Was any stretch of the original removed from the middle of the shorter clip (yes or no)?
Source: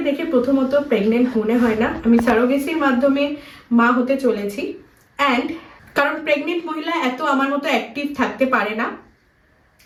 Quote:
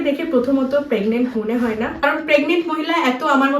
yes